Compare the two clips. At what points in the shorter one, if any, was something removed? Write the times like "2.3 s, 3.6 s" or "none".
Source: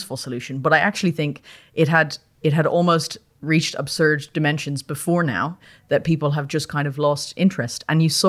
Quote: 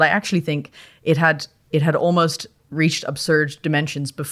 none